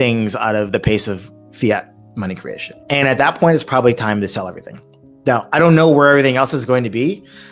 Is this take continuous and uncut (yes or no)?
no